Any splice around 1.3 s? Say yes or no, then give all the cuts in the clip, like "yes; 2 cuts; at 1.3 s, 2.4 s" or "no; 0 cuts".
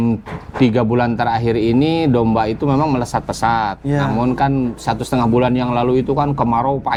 no; 0 cuts